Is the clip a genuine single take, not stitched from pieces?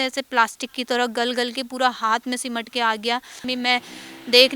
no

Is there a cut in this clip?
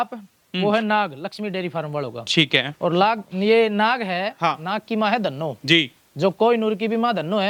no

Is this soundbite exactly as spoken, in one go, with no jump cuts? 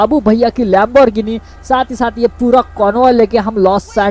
yes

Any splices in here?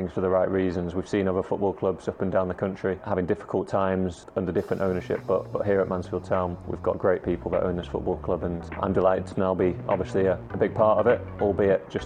yes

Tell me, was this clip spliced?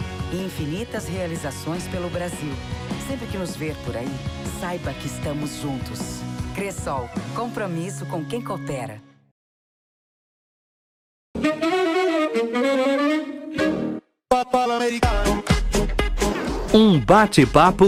no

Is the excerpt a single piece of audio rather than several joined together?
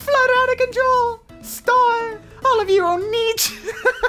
no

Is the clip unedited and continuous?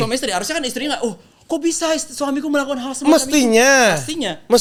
yes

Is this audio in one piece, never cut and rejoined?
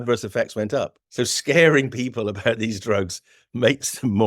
no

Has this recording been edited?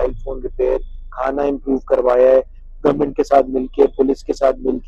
no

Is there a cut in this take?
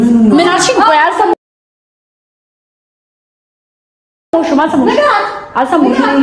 no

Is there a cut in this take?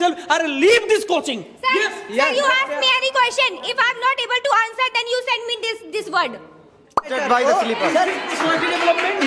yes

